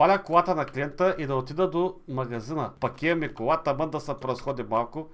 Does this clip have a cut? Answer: yes; 1 cut; at 2.7 s

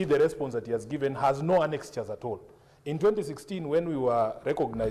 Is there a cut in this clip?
no; 0 cuts

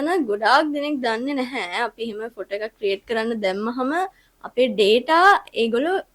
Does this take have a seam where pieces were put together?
no; 0 cuts

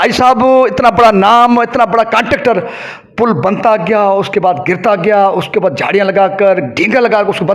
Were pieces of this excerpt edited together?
no; 0 cuts

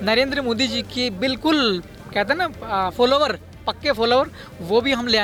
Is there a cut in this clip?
no; 0 cuts

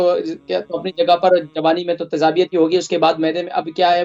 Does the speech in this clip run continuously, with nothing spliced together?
yes; 0 cuts

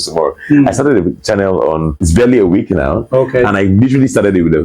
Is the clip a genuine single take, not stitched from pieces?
no; 2 cuts; at 2.0 s, 3.1 s

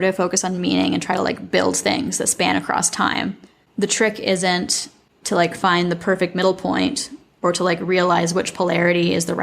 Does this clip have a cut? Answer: yes; 1 cut; at 4.8 s

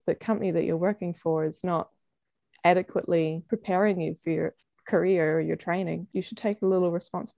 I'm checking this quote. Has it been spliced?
yes; 3 cuts; at 3.4 s, 4.6 s, 6.1 s

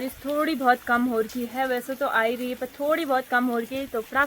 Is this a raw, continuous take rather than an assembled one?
yes; 0 cuts

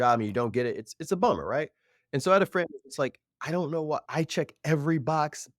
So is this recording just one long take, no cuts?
no; 1 cut; at 4.0 s

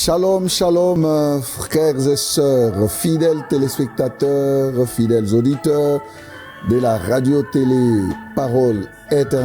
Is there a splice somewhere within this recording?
yes; 1 cut; at 1.0 s

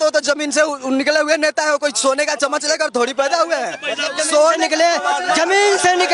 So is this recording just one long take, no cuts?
yes; 0 cuts

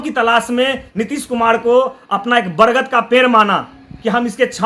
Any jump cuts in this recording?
no; 0 cuts

